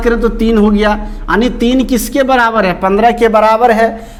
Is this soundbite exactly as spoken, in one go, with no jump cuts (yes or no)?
yes